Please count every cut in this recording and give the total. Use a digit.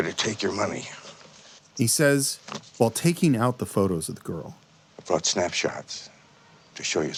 0